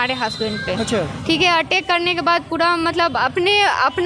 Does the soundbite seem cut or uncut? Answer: uncut